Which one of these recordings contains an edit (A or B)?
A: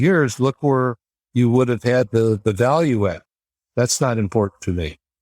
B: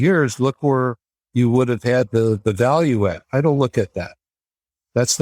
A